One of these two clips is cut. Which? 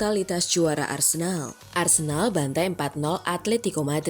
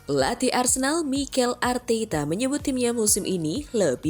first; 1 cut; at 1.5 s

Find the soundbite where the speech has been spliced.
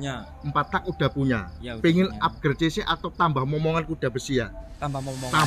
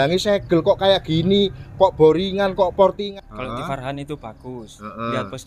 second; 1 cut; at 3.0 s

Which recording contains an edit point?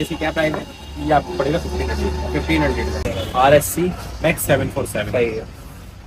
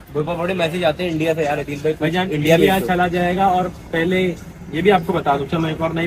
first; 1 cut; at 3.0 s

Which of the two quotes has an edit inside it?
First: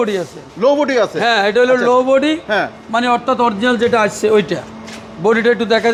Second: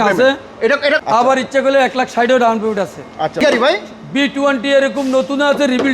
second; 2 cuts; at 1.0 s, 3.4 s

